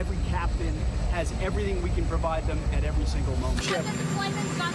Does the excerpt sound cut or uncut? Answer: cut